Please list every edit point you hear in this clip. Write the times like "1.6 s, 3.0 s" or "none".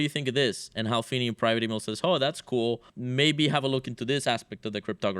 2.9 s